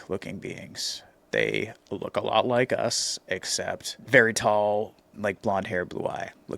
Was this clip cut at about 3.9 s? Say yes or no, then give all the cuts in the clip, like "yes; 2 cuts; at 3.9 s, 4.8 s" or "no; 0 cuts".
yes; 1 cut; at 3.9 s